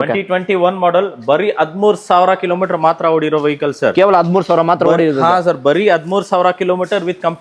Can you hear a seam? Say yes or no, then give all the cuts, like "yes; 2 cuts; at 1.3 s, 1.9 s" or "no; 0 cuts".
no; 0 cuts